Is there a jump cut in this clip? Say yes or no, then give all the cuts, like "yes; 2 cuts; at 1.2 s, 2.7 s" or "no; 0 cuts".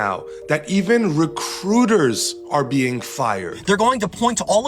yes; 1 cut; at 3.5 s